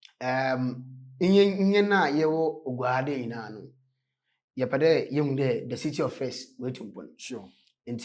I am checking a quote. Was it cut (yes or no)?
no